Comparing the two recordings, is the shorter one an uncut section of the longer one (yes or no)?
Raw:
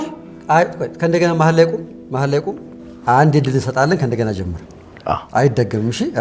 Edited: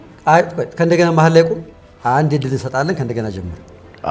no